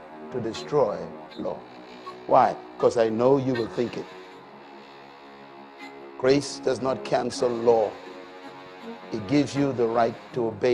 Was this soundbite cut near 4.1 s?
yes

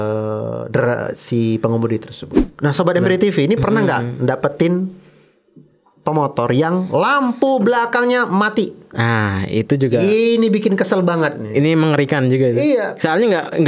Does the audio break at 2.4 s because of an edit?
yes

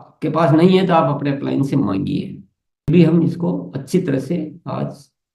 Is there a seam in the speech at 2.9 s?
yes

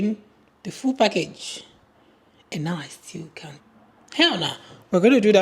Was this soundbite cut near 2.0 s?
no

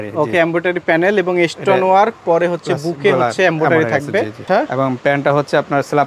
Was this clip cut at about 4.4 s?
yes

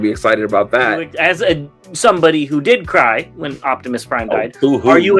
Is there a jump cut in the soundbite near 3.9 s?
no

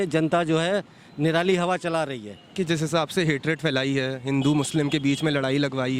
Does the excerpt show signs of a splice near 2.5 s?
yes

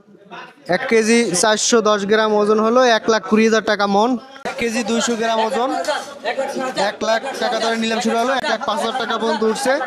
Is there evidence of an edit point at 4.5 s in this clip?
yes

